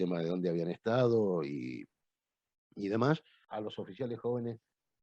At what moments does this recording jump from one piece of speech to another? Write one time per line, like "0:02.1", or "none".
0:03.5